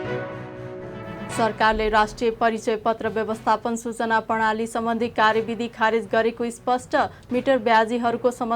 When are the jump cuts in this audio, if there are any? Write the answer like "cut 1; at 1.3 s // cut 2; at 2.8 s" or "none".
cut 1; at 1.4 s